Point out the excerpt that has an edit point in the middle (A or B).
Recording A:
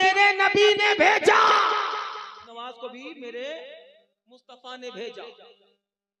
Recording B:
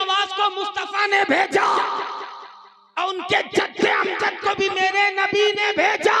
A